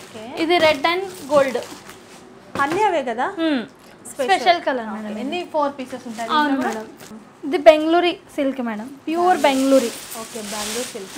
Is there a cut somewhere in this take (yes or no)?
no